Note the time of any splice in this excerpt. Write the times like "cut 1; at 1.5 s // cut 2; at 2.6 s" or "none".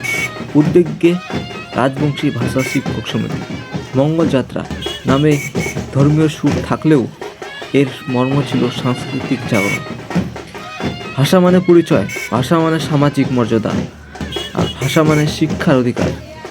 cut 1; at 9.8 s // cut 2; at 11.1 s